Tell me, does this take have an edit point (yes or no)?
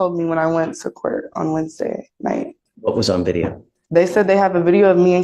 yes